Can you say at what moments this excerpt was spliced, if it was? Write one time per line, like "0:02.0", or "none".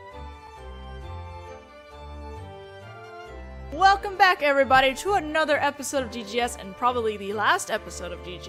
none